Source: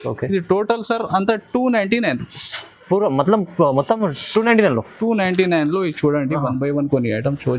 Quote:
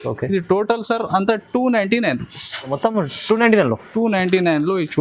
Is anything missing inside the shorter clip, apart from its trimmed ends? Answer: yes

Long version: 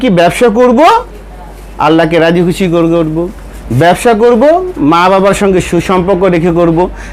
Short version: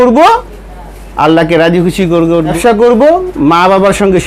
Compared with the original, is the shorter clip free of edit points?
no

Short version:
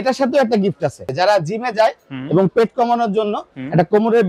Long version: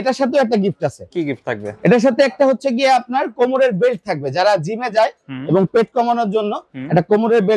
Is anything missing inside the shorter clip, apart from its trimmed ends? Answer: yes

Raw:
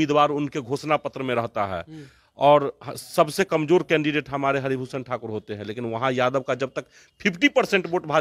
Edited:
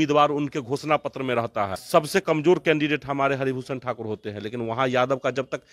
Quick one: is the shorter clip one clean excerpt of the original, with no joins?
no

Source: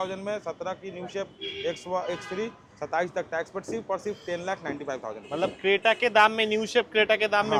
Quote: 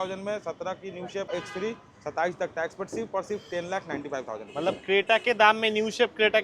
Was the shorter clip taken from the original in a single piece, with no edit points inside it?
no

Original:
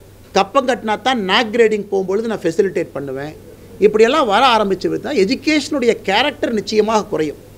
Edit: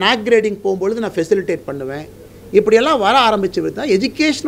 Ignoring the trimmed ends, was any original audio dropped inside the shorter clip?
no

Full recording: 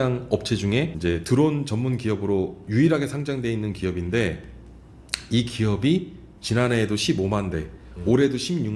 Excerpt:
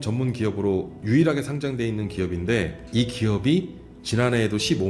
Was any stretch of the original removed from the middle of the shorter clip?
yes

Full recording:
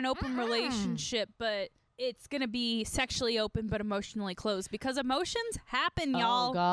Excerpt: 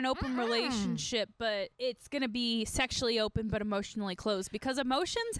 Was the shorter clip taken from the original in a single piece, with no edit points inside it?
no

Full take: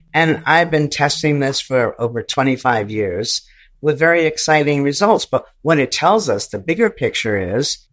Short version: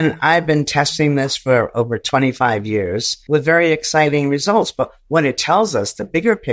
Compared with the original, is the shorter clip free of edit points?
no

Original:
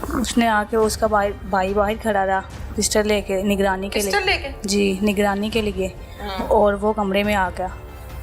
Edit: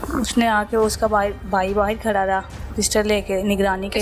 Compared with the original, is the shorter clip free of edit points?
yes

